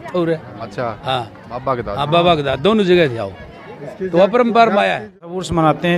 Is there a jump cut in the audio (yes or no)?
yes